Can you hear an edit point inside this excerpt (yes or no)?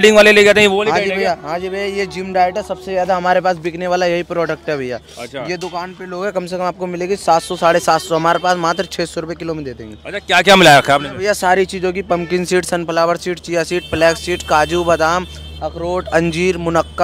no